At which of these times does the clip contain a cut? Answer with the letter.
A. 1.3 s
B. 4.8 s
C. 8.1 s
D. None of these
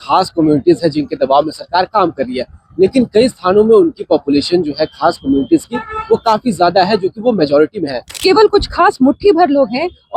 C